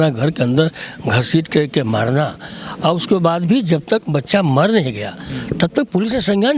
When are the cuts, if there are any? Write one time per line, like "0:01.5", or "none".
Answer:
none